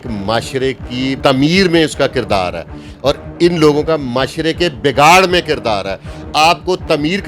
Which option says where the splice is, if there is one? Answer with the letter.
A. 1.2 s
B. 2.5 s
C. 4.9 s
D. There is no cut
A